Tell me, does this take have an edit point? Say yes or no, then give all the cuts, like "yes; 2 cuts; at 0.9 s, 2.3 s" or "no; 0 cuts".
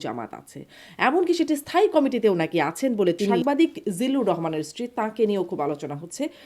yes; 1 cut; at 3.4 s